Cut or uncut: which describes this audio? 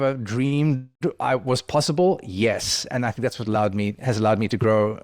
uncut